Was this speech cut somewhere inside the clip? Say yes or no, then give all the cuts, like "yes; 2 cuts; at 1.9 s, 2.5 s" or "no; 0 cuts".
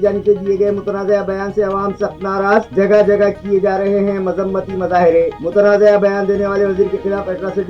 no; 0 cuts